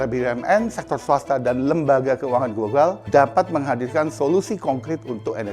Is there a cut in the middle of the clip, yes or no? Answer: yes